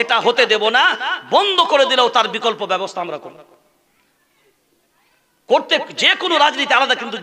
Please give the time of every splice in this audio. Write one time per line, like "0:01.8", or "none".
none